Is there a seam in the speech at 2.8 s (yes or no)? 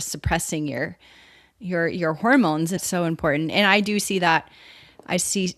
yes